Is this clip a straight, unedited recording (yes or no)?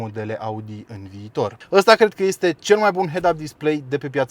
no